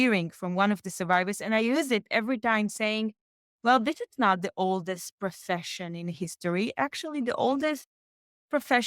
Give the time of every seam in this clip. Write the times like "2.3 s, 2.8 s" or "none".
none